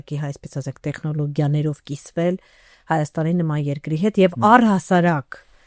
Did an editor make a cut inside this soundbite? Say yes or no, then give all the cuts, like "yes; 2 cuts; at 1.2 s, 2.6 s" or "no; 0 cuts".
no; 0 cuts